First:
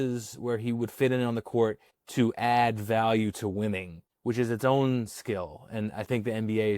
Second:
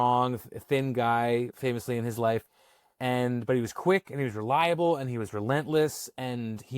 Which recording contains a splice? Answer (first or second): second